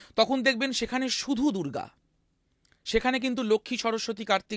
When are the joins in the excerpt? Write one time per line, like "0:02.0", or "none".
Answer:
none